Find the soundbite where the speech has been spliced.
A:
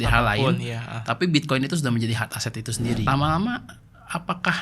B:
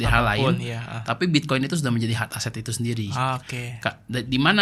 A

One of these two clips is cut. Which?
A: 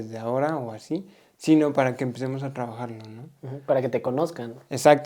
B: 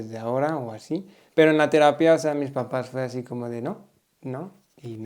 B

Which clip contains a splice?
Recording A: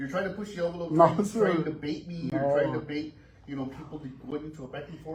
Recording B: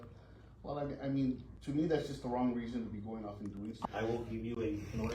B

